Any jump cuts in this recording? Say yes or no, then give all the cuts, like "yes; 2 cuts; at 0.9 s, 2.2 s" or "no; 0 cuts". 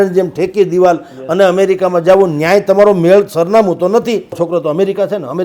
yes; 1 cut; at 4.4 s